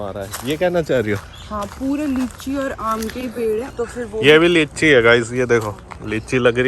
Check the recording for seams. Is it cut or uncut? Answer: cut